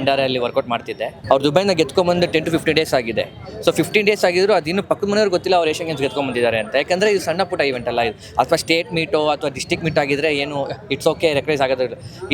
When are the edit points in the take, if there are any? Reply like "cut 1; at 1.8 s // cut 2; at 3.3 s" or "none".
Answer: cut 1; at 1.1 s